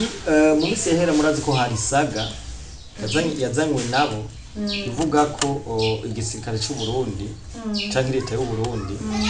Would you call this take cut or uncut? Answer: uncut